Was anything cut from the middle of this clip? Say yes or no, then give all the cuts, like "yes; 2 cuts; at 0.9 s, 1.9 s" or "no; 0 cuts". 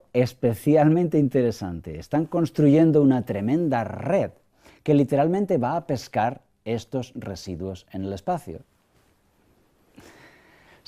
yes; 1 cut; at 5.5 s